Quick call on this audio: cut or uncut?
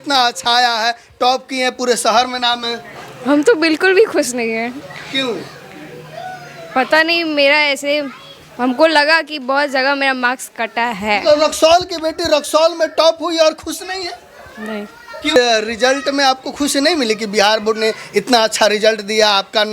cut